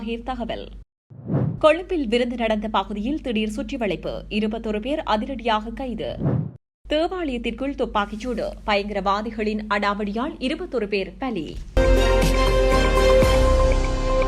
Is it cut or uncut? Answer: cut